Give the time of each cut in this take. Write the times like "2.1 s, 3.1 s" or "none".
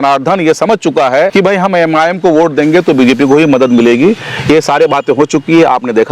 1.3 s